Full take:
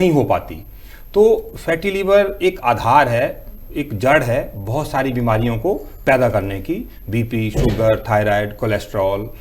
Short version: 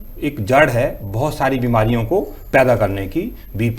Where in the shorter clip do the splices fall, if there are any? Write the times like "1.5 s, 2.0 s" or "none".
none